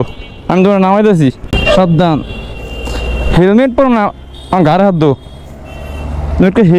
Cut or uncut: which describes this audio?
cut